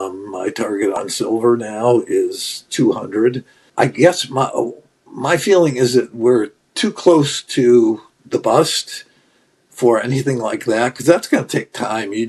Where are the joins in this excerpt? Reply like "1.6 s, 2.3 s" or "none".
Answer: 3.5 s